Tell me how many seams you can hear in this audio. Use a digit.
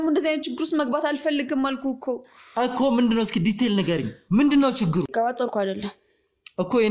1